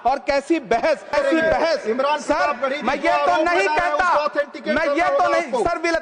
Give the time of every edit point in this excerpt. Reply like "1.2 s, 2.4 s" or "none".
1.1 s